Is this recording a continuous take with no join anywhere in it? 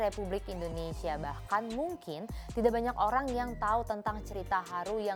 yes; 0 cuts

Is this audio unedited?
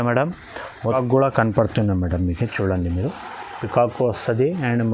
no; 1 cut; at 1.0 s

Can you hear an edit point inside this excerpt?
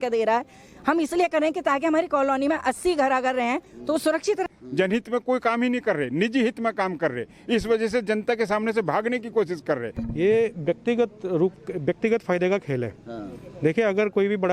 yes; 2 cuts; at 4.5 s, 10.0 s

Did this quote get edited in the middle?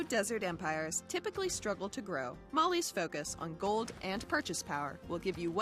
yes; 1 cut; at 1.4 s

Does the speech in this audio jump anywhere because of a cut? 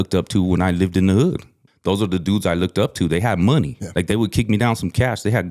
yes; 2 cuts; at 1.6 s, 3.8 s

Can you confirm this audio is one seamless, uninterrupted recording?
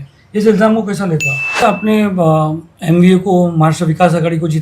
no; 1 cut; at 1.6 s

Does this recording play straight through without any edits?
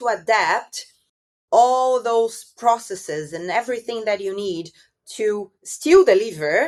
yes; 0 cuts

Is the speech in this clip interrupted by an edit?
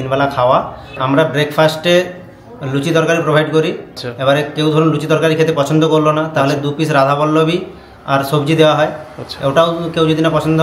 yes; 2 cuts; at 1.0 s, 3.9 s

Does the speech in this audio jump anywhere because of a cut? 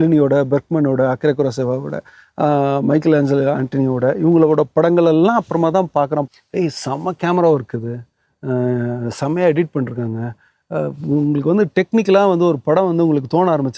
yes; 1 cut; at 6.3 s

